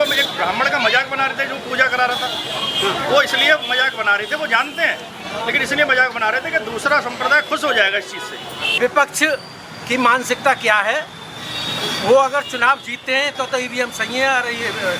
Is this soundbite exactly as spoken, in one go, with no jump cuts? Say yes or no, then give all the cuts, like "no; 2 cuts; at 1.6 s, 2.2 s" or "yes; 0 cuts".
no; 1 cut; at 8.8 s